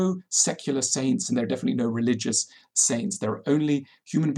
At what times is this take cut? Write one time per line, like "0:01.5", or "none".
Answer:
none

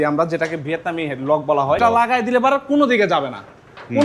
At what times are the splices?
0:01.8

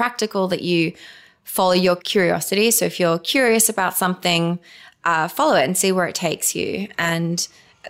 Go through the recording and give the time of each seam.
0:02.0

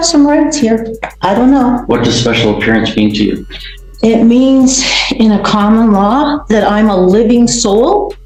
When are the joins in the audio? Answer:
none

